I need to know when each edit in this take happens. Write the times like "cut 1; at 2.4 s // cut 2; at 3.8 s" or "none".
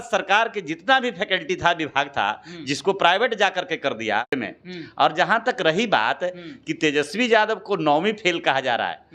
cut 1; at 4.4 s